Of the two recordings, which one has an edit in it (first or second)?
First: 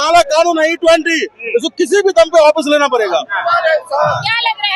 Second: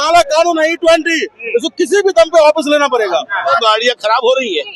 second